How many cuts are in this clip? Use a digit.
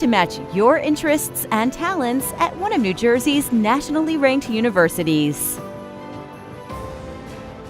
1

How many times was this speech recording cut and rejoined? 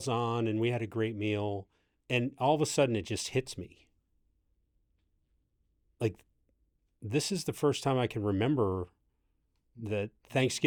0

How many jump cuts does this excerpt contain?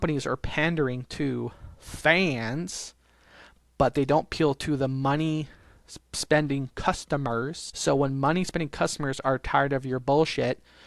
1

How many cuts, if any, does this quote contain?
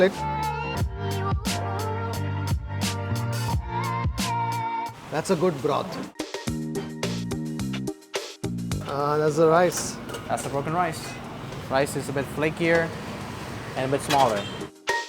1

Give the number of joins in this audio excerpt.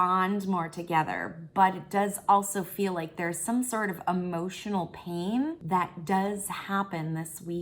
1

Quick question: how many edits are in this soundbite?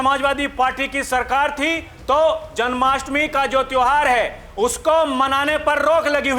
0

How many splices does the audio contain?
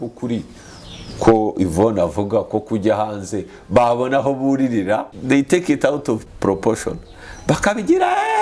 2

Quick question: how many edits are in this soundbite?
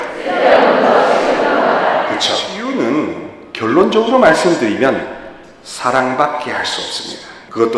1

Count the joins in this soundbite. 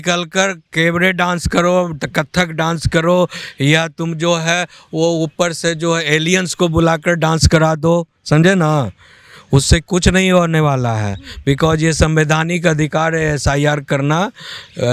0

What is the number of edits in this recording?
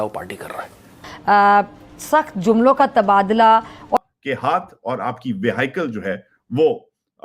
1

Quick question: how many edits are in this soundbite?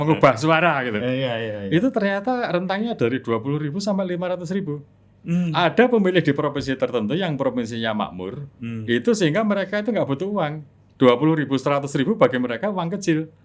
0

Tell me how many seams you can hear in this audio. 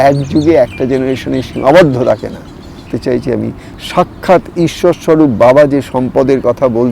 1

